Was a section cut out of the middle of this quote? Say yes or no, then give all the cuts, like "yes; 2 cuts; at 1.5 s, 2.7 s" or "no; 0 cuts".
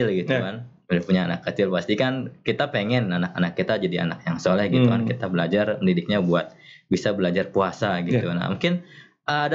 no; 0 cuts